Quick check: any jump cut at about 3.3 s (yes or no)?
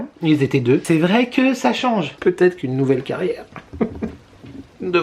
no